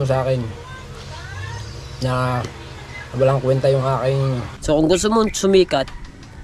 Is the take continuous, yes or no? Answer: no